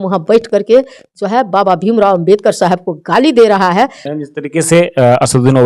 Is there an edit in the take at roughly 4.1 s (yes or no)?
yes